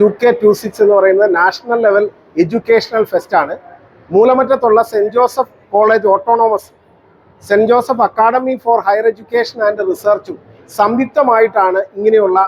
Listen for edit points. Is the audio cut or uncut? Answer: uncut